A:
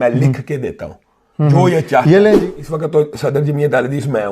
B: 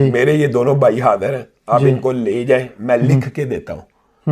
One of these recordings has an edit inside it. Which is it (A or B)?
A